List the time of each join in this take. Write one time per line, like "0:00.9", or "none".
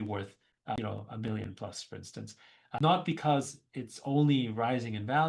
0:00.8
0:02.8